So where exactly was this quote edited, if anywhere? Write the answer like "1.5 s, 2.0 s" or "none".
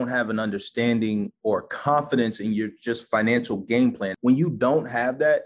4.1 s